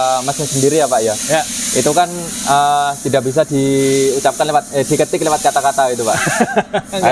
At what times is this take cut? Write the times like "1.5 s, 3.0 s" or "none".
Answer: none